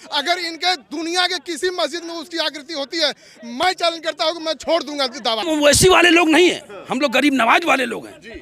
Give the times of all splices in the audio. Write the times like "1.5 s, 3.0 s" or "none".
5.4 s